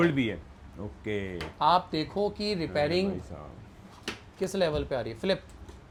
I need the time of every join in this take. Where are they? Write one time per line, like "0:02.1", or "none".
none